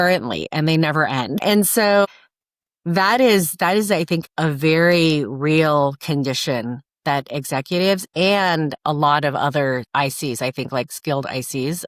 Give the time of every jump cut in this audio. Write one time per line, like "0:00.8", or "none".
0:08.7
0:09.9